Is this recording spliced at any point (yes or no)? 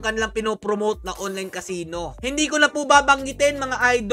no